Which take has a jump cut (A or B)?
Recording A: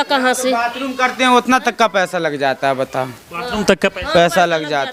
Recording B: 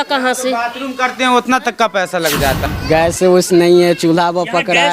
B